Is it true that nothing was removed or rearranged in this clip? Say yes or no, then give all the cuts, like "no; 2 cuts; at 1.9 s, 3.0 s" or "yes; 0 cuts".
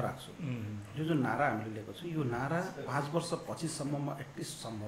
yes; 0 cuts